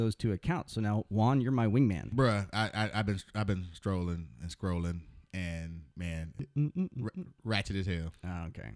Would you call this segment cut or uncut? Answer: cut